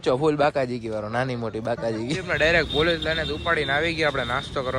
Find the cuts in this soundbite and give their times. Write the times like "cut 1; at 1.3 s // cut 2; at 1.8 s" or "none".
cut 1; at 2.3 s

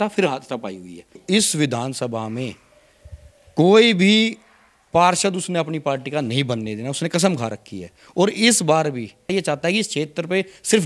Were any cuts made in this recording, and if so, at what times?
cut 1; at 1.2 s // cut 2; at 9.3 s

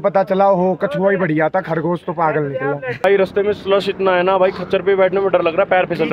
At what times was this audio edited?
cut 1; at 3.0 s

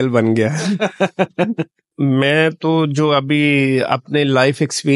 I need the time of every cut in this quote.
cut 1; at 1.9 s

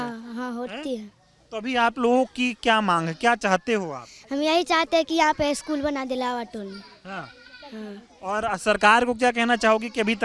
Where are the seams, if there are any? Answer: none

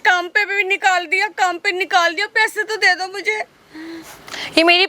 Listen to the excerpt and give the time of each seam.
none

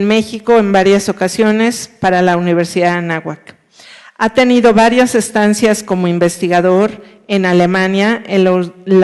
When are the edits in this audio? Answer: cut 1; at 7.6 s

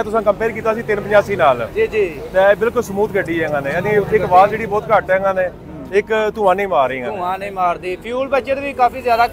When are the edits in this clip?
none

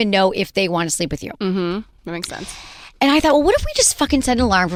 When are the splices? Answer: none

